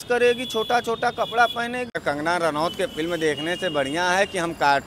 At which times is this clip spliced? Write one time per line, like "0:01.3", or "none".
0:02.0